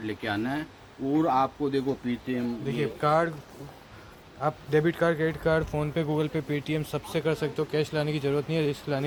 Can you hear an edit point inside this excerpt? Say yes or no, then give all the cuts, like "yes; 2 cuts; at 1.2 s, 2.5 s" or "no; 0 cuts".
no; 0 cuts